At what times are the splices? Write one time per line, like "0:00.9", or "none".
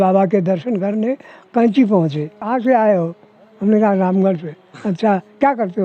0:02.4